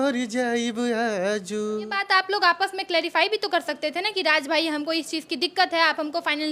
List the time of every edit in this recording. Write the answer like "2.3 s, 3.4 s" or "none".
2.0 s